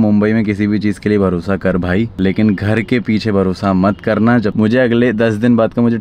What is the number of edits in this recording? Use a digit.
1